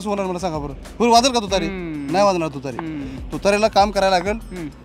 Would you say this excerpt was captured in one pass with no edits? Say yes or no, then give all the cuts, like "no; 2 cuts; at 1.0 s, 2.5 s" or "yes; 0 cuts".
yes; 0 cuts